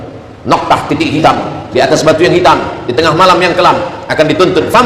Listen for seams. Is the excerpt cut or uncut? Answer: uncut